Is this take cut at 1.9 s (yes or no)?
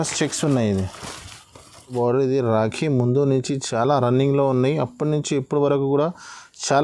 yes